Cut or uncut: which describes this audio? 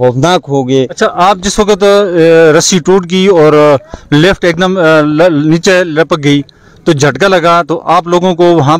cut